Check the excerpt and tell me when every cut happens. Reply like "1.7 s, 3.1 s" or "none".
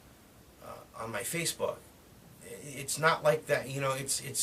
2.2 s